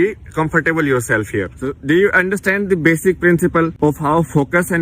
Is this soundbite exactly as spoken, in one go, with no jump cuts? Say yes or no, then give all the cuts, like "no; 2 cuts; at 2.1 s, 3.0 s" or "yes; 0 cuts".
no; 2 cuts; at 1.7 s, 3.7 s